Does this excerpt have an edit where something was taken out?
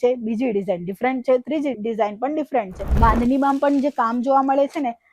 yes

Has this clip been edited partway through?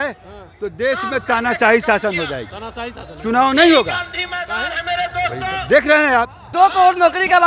yes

